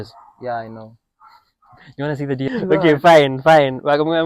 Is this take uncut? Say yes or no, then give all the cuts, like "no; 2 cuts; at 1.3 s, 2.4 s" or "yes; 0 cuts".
no; 1 cut; at 2.3 s